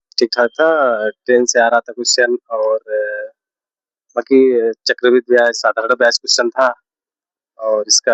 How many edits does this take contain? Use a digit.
0